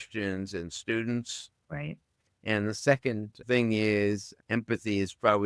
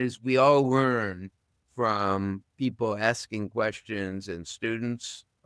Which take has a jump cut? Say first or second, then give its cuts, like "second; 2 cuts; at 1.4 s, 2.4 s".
first; 2 cuts; at 3.4 s, 4.3 s